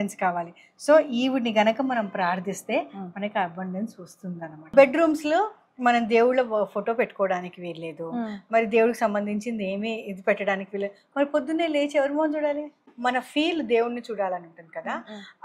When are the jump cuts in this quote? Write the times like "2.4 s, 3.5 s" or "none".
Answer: 4.6 s, 12.9 s

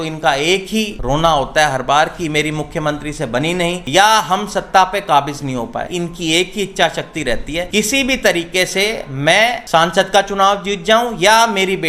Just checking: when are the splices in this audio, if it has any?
1.0 s, 3.8 s, 5.9 s, 7.7 s, 9.6 s

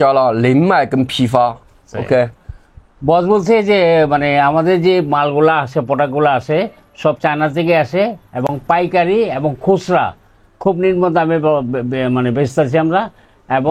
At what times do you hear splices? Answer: none

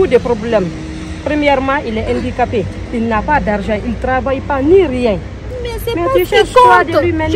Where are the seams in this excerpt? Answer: none

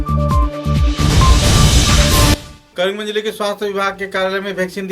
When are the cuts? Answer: 2.5 s

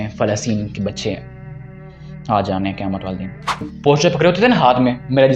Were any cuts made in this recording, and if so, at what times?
3.7 s

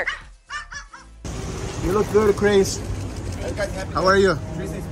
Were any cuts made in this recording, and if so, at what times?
1.2 s

